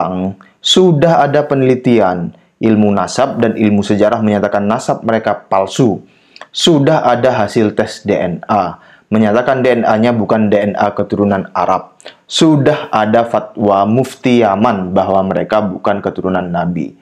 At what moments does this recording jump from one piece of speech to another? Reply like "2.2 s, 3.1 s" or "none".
none